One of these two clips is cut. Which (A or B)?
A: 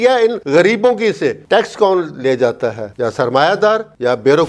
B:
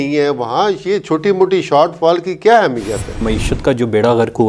B